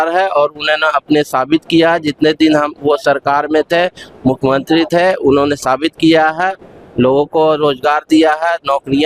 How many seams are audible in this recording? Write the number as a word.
zero